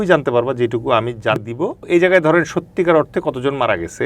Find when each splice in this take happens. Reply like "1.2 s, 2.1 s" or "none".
1.4 s